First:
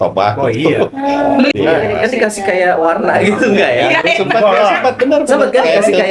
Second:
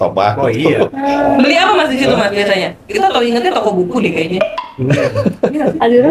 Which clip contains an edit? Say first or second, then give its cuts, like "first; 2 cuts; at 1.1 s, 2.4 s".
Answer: first; 1 cut; at 1.5 s